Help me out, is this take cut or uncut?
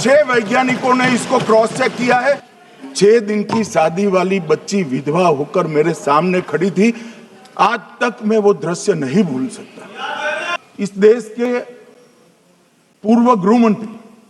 cut